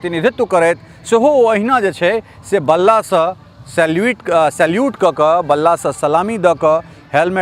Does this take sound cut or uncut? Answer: uncut